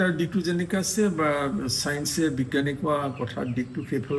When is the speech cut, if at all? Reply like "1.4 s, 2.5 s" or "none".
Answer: none